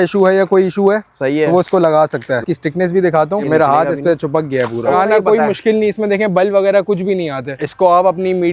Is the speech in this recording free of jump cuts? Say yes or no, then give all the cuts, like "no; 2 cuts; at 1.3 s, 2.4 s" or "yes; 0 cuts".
no; 4 cuts; at 2.4 s, 3.5 s, 4.9 s, 7.6 s